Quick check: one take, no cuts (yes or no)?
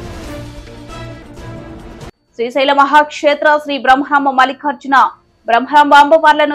no